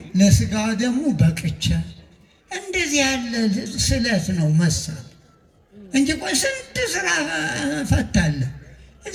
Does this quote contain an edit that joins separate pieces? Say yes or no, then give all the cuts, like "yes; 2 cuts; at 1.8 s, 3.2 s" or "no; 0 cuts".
no; 0 cuts